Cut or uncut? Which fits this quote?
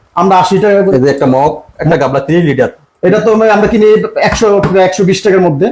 cut